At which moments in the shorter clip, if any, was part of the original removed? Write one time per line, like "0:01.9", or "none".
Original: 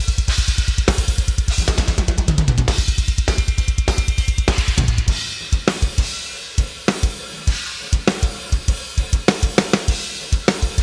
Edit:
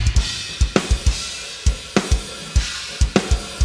none